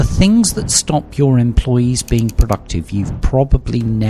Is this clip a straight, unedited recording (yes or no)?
yes